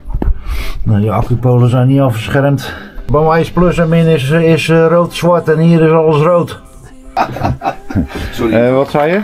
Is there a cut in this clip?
yes; 2 cuts; at 3.1 s, 7.2 s

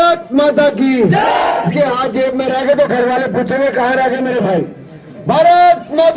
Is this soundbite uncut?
no; 1 cut; at 1.7 s

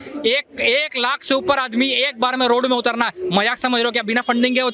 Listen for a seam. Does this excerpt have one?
no; 0 cuts

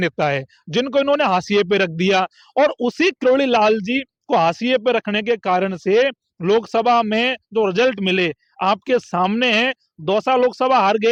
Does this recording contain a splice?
no; 0 cuts

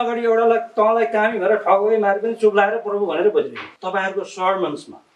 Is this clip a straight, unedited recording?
no; 1 cut; at 3.6 s

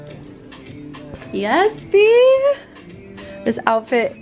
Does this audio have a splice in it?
no; 0 cuts

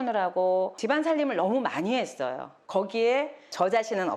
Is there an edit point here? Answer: no; 0 cuts

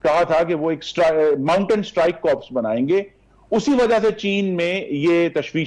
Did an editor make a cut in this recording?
no; 0 cuts

